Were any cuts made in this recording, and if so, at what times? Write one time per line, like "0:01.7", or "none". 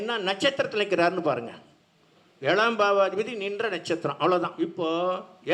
0:04.5